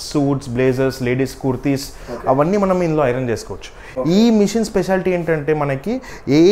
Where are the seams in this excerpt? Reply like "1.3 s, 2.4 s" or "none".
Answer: none

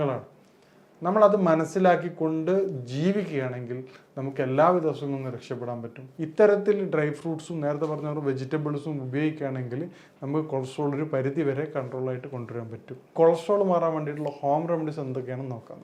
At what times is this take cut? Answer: 6.0 s, 13.1 s

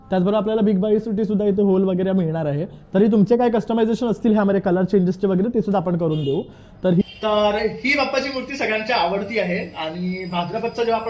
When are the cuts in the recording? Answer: 7.0 s

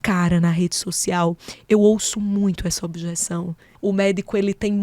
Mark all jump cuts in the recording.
3.6 s

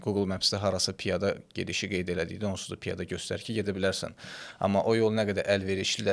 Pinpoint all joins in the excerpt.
none

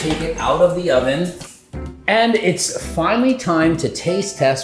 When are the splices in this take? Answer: 1.4 s

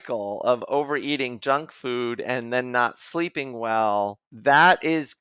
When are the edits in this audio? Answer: 4.2 s

